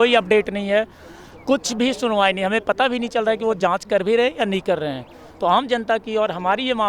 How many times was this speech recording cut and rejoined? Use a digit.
0